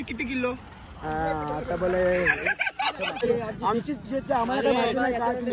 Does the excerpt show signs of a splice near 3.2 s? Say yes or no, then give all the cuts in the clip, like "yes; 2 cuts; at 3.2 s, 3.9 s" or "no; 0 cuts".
yes; 1 cut; at 3.2 s